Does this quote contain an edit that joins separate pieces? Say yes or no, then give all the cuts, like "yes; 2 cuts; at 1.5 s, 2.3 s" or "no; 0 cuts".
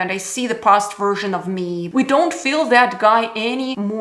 yes; 1 cut; at 1.9 s